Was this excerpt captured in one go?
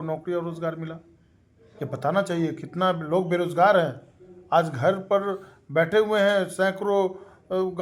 yes; 0 cuts

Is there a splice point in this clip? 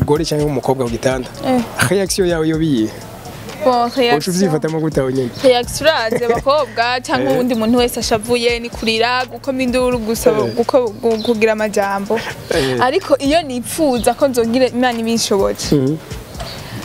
no; 0 cuts

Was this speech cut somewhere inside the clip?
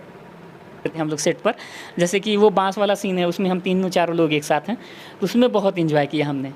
yes; 1 cut; at 0.9 s

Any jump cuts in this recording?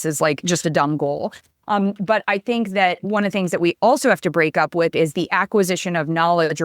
yes; 1 cut; at 3.0 s

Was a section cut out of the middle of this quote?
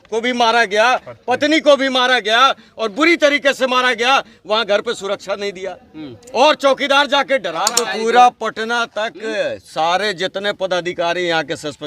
yes; 1 cut; at 7.8 s

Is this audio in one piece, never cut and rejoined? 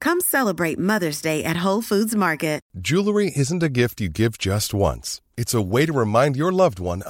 no; 1 cut; at 2.7 s

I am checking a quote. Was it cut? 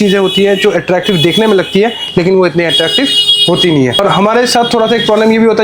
no; 0 cuts

